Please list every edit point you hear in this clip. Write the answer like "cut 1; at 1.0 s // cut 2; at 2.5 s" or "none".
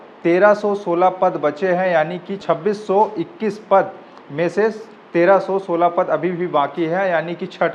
cut 1; at 2.4 s